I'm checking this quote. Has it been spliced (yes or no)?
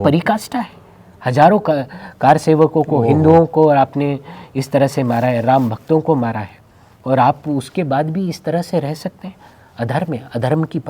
no